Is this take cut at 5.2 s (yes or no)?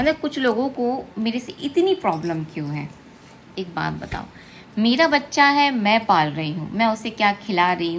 no